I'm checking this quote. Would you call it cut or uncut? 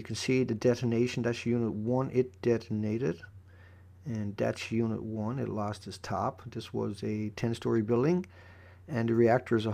uncut